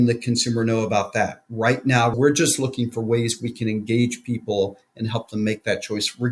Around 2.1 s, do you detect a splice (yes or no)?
yes